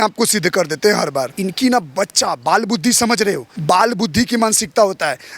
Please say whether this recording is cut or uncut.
cut